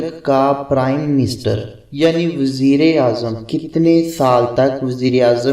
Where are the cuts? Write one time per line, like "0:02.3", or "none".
none